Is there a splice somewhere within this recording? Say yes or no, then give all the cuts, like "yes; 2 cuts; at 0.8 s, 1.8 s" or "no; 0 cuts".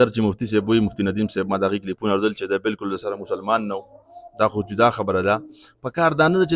no; 0 cuts